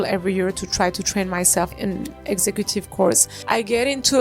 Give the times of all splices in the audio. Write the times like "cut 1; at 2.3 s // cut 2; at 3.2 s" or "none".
cut 1; at 1.7 s // cut 2; at 3.3 s